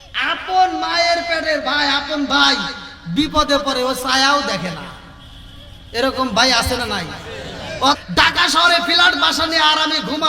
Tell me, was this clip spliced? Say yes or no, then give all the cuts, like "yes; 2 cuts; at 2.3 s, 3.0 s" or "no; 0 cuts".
yes; 1 cut; at 8.0 s